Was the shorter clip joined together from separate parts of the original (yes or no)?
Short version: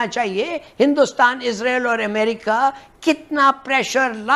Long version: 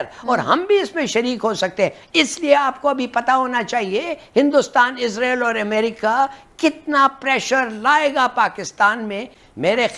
no